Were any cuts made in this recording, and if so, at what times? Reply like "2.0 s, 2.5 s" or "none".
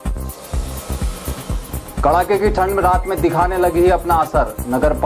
1.6 s